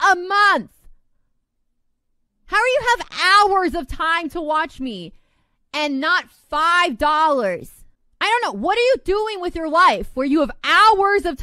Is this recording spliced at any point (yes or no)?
no